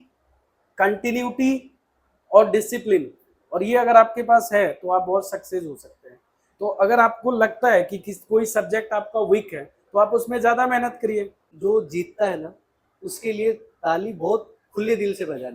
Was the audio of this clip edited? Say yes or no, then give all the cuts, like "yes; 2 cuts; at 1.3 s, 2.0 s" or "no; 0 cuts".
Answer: yes; 1 cut; at 11.4 s